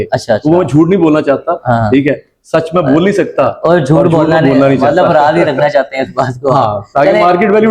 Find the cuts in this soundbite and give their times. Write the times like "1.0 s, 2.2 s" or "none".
none